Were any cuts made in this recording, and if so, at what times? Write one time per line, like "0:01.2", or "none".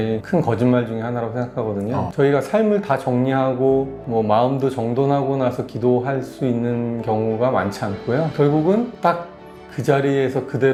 none